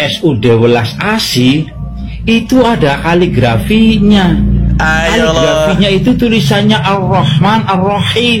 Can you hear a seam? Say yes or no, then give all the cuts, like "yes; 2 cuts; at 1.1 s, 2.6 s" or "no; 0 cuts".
no; 0 cuts